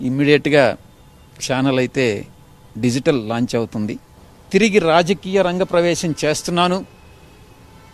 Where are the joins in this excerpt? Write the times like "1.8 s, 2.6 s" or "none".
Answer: none